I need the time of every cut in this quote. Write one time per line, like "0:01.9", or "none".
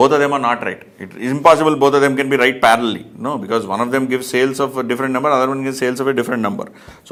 none